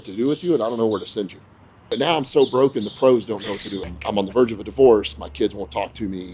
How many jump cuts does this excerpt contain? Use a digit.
2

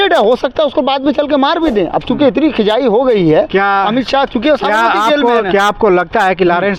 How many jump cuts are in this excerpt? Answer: 0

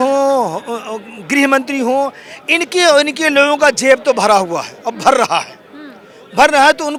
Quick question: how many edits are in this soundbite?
0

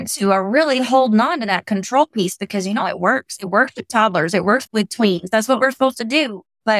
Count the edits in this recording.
1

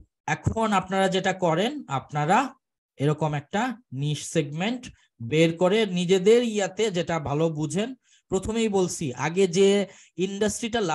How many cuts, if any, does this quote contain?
0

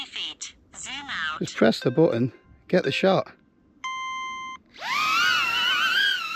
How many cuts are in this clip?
0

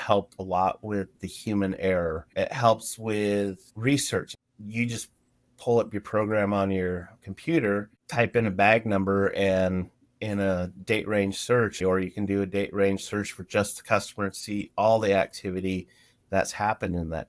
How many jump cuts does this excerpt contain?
3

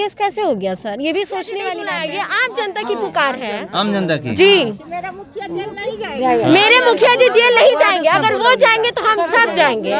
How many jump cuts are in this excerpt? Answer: 1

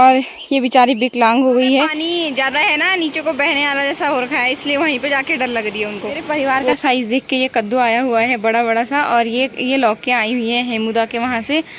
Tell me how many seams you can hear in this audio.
2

